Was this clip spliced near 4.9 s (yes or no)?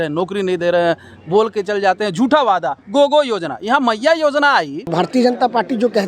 yes